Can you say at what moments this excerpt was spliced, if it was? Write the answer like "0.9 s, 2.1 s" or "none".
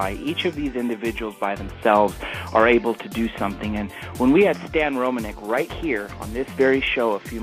2.0 s